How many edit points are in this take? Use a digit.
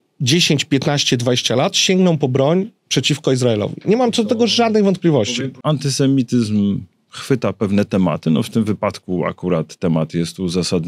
1